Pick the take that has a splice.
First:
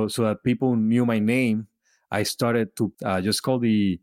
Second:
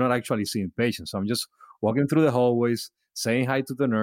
first; 1 cut; at 3.0 s

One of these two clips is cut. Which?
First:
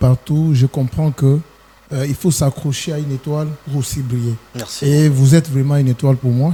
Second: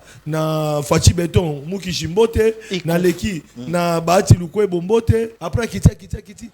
second; 1 cut; at 5.4 s

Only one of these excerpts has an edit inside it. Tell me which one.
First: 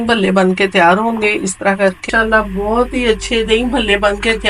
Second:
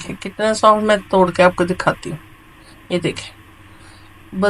first; 1 cut; at 2.1 s

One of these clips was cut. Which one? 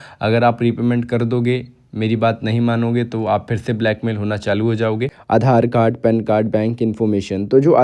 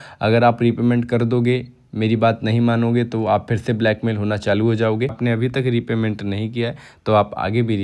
first; 1 cut; at 5.1 s

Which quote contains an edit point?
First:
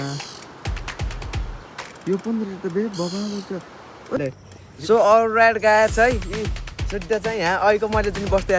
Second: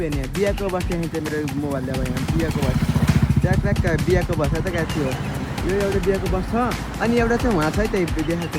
first; 1 cut; at 4.2 s

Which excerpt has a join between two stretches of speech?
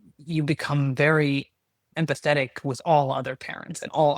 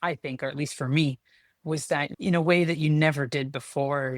second; 1 cut; at 2.1 s

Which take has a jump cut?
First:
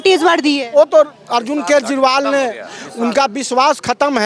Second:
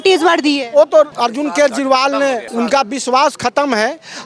second; 2 cuts; at 1.1 s, 2.5 s

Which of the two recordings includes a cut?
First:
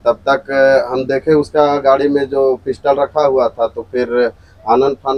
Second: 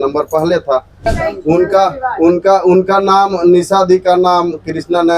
second; 1 cut; at 1.0 s

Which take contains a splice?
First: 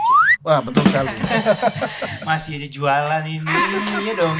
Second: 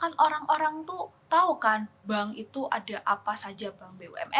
first; 1 cut; at 0.9 s

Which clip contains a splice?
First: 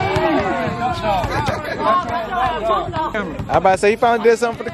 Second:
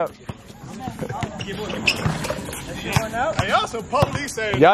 first; 1 cut; at 3.2 s

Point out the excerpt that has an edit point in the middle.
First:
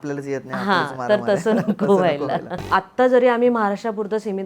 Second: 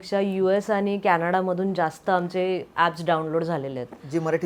first; 1 cut; at 2.6 s

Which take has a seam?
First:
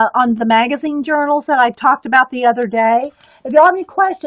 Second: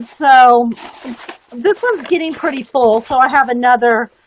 second; 1 cut; at 1.1 s

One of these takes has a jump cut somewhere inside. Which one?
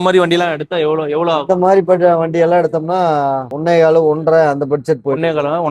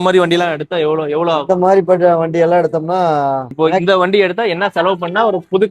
second; 1 cut; at 3.5 s

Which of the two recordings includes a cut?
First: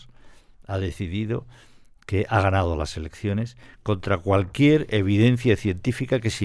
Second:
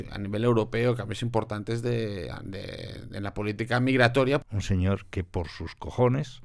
second; 1 cut; at 4.4 s

